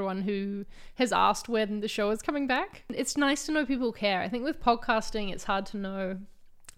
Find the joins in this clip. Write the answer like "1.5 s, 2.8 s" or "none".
2.9 s